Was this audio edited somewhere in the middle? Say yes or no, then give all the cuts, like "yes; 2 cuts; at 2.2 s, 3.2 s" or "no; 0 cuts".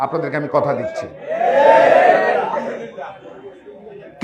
no; 0 cuts